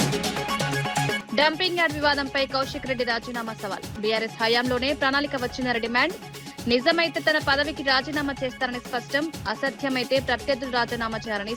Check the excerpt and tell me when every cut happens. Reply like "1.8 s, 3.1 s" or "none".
1.1 s